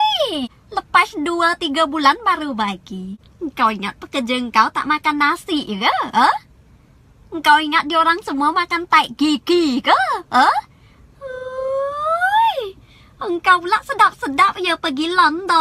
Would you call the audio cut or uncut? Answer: cut